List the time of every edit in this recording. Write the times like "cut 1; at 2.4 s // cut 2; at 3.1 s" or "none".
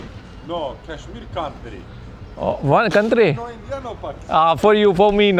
none